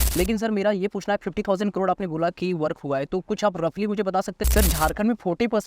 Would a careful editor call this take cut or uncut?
cut